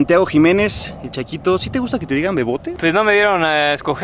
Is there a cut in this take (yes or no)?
yes